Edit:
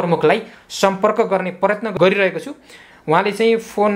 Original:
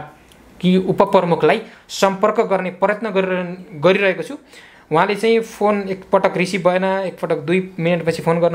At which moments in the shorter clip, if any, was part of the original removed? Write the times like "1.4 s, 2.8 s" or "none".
1.9 s